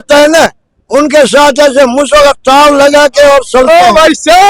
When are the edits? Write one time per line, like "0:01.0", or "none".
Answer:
none